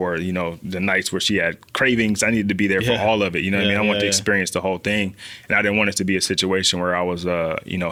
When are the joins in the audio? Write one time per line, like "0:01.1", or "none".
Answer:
none